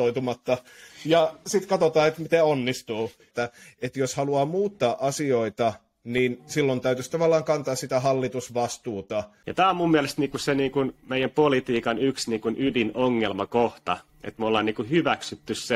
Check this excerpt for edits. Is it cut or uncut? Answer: cut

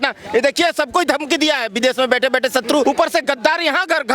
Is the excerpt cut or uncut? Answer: cut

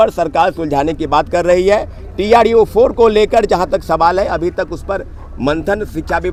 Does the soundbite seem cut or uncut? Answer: uncut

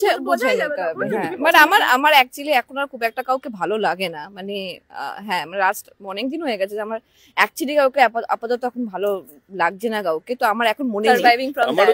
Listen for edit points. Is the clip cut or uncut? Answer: cut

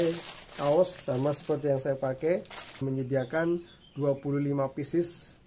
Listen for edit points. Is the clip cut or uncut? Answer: cut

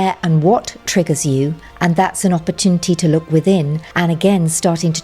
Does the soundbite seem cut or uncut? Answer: cut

